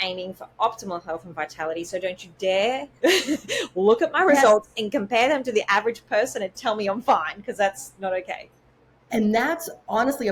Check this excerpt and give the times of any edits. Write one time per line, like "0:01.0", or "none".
none